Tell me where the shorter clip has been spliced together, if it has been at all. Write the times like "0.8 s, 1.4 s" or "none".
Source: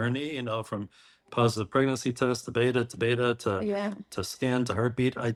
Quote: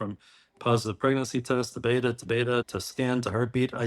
2.7 s